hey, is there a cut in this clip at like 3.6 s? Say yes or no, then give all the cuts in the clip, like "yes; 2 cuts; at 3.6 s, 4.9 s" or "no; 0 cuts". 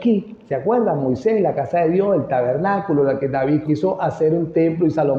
yes; 1 cut; at 3.6 s